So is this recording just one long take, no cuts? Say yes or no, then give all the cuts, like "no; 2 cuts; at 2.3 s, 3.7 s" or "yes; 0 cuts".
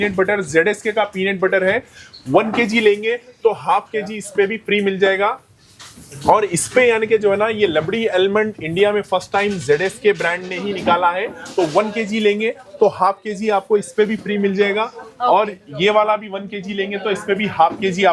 yes; 0 cuts